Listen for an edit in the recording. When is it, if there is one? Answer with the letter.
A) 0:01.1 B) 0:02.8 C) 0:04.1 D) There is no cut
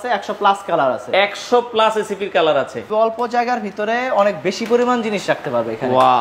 B